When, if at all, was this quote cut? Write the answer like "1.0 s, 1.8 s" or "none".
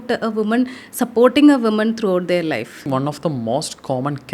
2.9 s